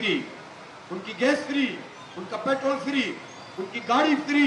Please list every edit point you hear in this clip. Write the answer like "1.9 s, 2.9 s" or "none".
none